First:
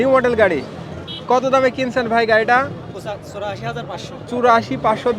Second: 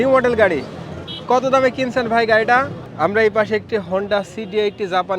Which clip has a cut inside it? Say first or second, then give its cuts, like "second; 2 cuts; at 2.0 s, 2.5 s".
second; 1 cut; at 2.8 s